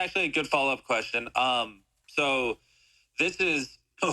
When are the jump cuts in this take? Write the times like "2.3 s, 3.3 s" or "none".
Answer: none